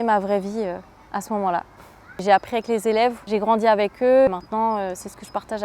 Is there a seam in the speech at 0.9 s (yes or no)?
no